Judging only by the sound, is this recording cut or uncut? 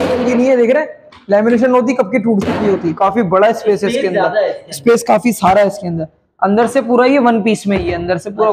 cut